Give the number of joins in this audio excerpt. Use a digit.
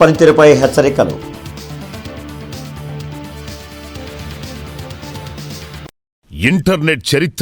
1